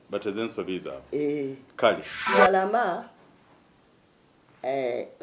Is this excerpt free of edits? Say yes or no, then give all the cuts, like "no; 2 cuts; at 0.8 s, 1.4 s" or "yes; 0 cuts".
no; 1 cut; at 2.1 s